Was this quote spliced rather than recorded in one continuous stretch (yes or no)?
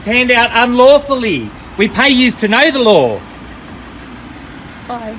no